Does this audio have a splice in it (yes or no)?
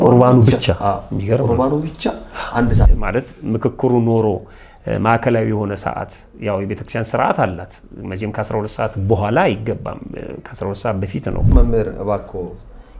yes